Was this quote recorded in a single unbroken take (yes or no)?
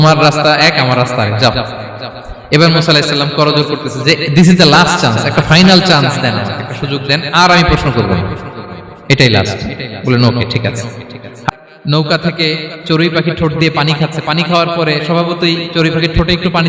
no